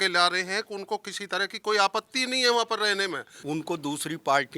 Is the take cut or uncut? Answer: cut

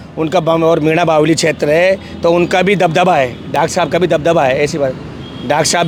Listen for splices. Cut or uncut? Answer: uncut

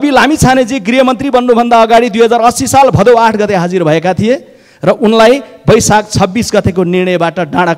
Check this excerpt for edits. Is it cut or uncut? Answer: uncut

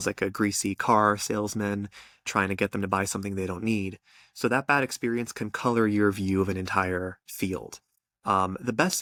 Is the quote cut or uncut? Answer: uncut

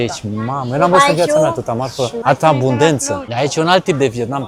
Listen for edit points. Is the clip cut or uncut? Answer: cut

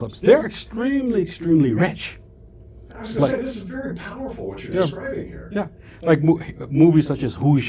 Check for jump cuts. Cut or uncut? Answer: uncut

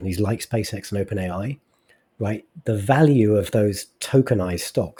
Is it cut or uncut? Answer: uncut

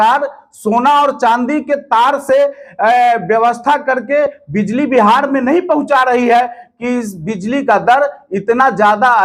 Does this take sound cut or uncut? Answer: uncut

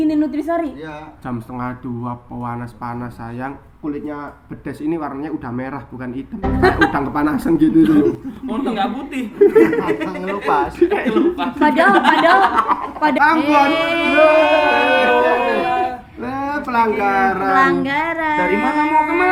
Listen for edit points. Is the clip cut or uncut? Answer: cut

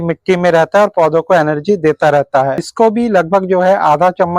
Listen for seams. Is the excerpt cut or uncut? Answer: cut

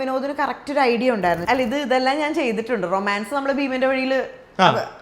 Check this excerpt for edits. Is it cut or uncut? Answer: cut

